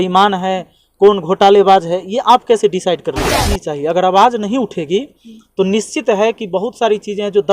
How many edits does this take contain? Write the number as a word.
one